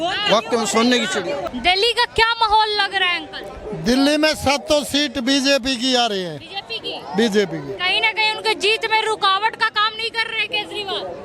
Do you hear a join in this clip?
no; 0 cuts

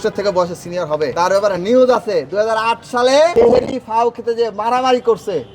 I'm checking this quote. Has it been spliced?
yes; 2 cuts; at 1.1 s, 3.3 s

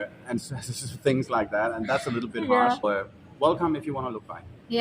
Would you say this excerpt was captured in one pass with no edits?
no; 1 cut; at 2.8 s

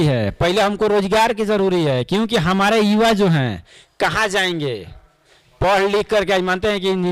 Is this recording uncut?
yes; 0 cuts

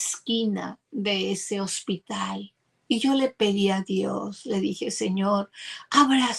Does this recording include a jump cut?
no; 0 cuts

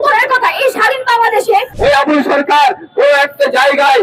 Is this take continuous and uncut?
no; 1 cut; at 1.7 s

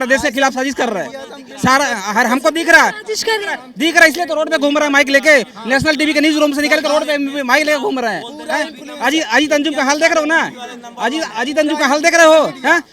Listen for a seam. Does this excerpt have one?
no; 0 cuts

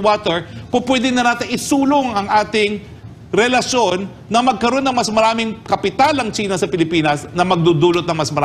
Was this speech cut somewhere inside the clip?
no; 0 cuts

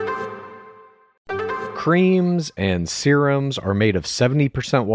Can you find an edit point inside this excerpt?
yes; 1 cut; at 1.7 s

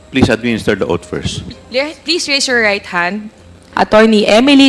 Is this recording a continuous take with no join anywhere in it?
no; 1 cut; at 3.7 s

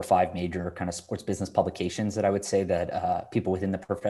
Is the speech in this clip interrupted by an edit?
no; 0 cuts

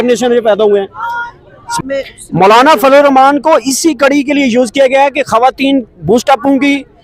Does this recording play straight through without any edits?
no; 1 cut; at 1.8 s

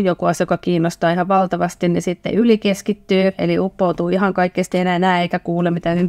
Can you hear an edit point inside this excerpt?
no; 0 cuts

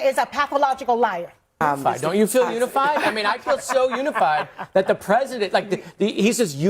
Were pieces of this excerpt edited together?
yes; 1 cut; at 1.6 s

